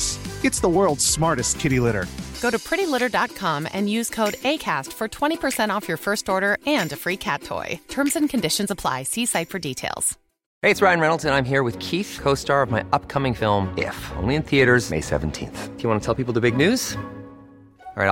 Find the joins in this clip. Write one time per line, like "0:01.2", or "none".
0:10.4